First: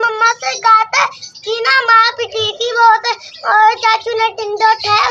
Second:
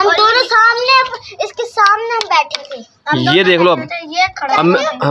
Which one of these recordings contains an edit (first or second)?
second